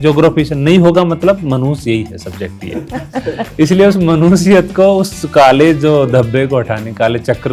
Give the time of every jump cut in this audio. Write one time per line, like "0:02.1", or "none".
none

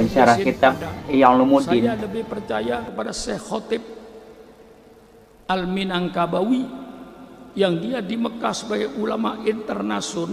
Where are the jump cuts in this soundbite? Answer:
0:01.9

